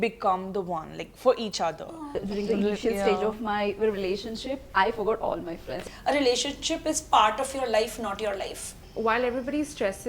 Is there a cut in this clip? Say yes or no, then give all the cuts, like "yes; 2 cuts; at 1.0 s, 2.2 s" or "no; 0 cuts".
yes; 3 cuts; at 2.2 s, 5.8 s, 8.7 s